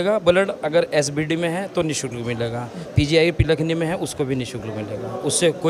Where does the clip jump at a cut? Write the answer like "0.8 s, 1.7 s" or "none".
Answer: none